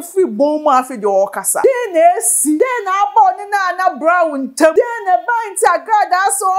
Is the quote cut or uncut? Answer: cut